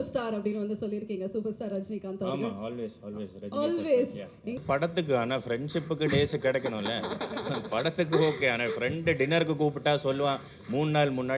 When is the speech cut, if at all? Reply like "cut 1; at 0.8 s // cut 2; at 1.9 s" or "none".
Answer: cut 1; at 4.6 s